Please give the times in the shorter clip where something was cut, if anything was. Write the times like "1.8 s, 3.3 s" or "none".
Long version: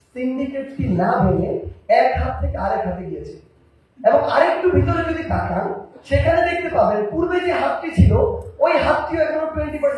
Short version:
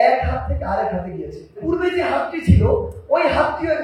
1.6 s